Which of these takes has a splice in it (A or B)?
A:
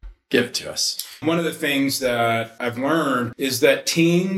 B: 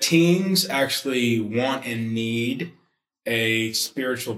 A